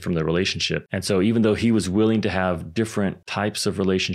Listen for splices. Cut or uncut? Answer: cut